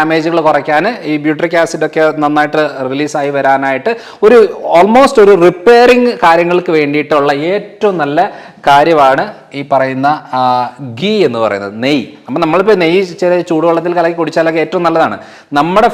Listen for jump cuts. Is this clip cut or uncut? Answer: uncut